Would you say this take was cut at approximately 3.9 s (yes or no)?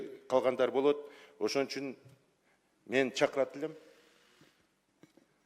no